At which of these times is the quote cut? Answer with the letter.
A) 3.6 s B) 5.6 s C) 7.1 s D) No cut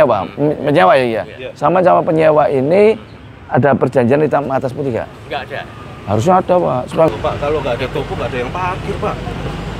C